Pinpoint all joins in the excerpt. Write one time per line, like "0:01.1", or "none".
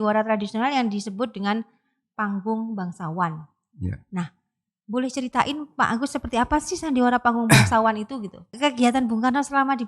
0:08.5